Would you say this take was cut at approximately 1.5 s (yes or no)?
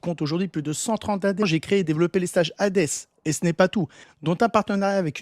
yes